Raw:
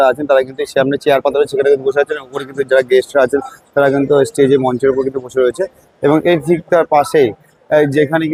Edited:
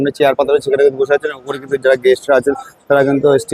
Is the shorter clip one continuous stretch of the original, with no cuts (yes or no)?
yes